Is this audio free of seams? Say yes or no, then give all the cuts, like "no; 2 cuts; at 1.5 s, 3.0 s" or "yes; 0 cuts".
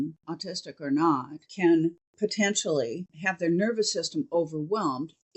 no; 3 cuts; at 1.4 s, 2.0 s, 3.1 s